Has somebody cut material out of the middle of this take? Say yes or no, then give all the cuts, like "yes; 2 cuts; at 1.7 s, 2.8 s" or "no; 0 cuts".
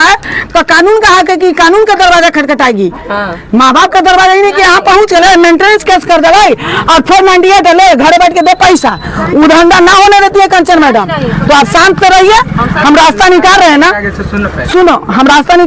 no; 0 cuts